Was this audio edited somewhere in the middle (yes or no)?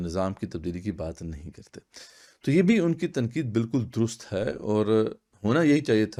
no